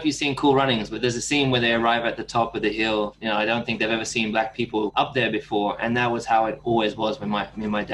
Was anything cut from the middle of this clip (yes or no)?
yes